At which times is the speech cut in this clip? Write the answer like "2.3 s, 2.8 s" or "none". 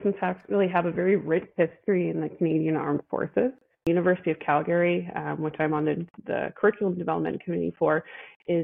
3.9 s